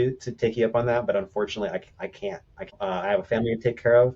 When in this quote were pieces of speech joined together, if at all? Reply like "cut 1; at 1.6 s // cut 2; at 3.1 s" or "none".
cut 1; at 2.8 s